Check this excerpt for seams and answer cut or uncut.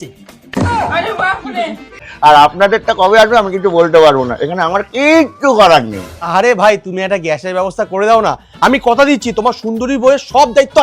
cut